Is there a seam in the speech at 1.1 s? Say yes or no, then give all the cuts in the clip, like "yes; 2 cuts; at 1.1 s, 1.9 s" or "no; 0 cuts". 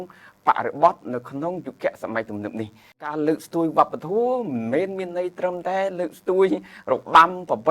no; 1 cut; at 3.1 s